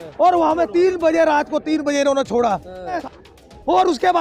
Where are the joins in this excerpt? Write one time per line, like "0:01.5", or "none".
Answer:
0:03.0